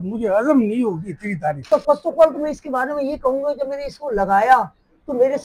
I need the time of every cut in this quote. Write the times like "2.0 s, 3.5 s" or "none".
1.6 s

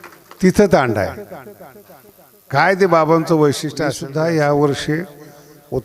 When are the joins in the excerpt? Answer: 4.0 s

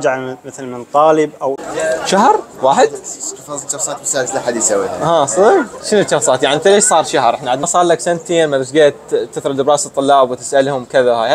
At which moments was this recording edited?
1.6 s, 5.8 s, 7.6 s

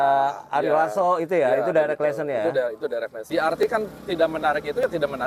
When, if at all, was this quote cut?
3.2 s

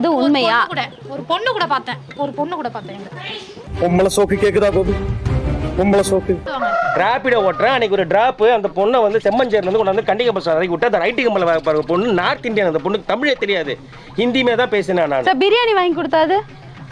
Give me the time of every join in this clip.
6.5 s

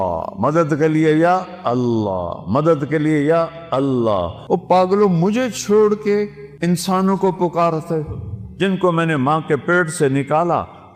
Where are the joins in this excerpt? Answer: 4.3 s, 6.4 s

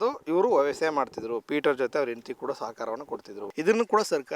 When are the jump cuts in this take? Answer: 3.4 s

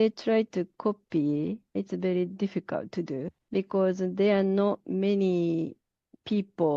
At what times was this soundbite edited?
1.7 s, 3.4 s

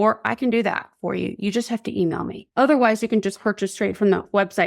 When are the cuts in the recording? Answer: 2.4 s

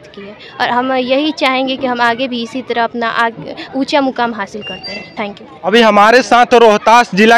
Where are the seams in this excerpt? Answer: 5.7 s

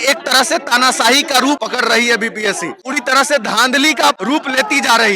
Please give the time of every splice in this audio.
1.6 s, 2.8 s, 4.2 s

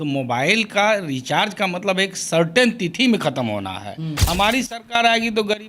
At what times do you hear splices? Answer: 4.1 s

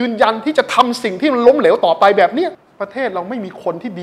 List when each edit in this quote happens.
2.6 s

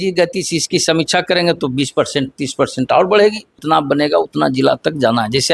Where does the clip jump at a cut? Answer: 3.5 s

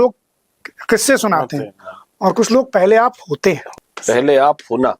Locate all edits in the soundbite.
3.7 s

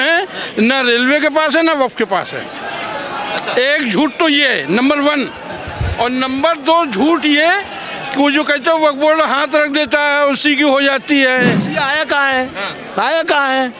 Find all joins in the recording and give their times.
11.7 s

